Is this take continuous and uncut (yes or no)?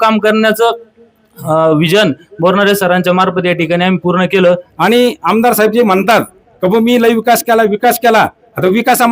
no